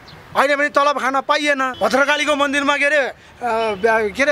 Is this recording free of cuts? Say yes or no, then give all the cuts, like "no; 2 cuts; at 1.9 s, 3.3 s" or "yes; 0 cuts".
no; 1 cut; at 1.7 s